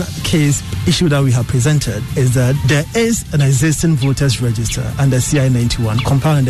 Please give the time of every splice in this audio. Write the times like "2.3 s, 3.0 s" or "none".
2.3 s